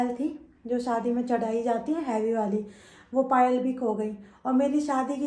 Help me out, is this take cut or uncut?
uncut